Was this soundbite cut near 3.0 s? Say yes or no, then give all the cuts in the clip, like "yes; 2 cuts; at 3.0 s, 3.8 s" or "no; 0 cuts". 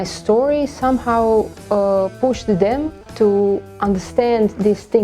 yes; 1 cut; at 3.0 s